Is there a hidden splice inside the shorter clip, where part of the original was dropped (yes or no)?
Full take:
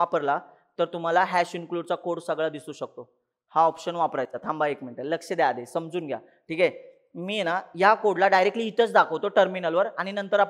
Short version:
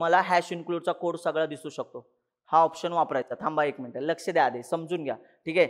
no